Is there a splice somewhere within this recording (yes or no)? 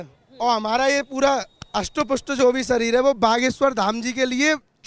no